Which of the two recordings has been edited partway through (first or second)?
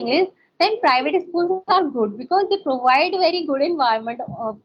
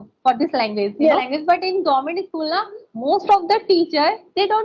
second